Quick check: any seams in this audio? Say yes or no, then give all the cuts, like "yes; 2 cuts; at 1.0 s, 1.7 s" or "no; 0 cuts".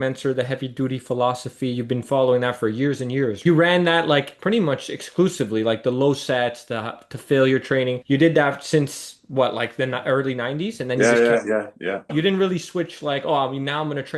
yes; 2 cuts; at 3.4 s, 12.1 s